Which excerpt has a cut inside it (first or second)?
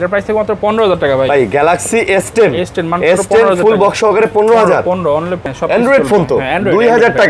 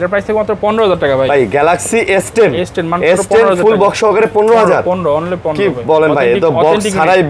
first